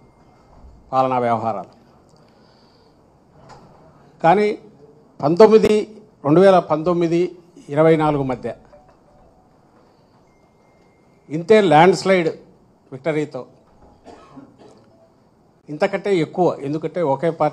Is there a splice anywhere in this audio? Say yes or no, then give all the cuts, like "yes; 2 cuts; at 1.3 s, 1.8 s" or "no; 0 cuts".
no; 0 cuts